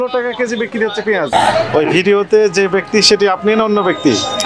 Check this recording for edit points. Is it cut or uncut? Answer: cut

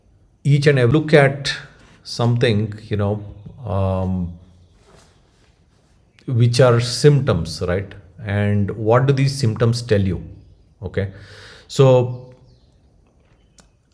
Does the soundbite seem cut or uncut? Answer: cut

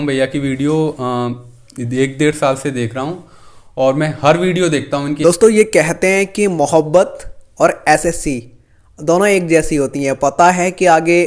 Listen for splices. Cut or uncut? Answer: cut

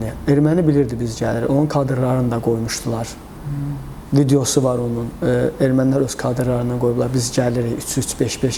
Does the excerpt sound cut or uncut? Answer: uncut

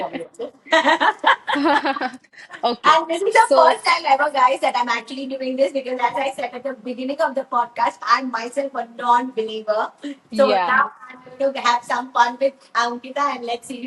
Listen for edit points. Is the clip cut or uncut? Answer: uncut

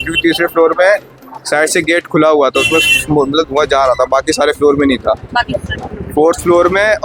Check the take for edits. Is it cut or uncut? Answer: uncut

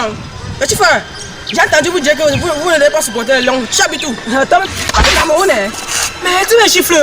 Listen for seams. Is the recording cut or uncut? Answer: cut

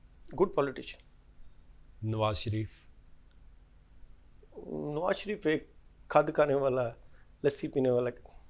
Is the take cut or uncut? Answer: uncut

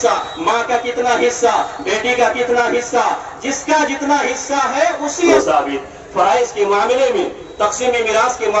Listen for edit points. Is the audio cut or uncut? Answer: cut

